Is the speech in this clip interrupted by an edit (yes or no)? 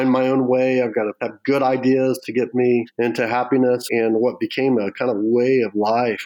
yes